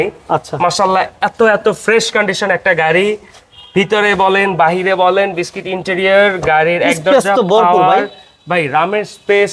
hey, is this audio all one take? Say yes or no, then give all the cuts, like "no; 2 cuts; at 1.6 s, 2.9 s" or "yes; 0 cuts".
yes; 0 cuts